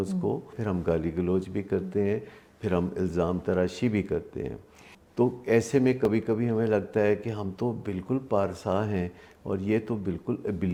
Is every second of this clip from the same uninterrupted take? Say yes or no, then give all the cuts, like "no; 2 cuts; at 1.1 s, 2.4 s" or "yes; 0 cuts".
yes; 0 cuts